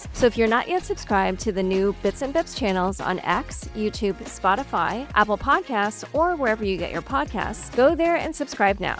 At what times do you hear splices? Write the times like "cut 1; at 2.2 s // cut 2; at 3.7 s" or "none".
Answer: none